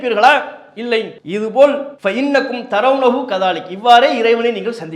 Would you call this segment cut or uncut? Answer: cut